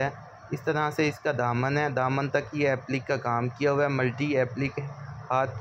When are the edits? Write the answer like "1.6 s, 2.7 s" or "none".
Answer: none